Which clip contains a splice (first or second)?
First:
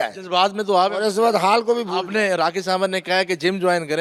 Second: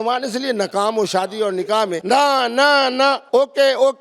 second